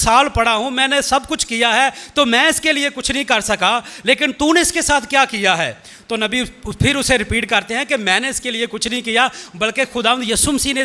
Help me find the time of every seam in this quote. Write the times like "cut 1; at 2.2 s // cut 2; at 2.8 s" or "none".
none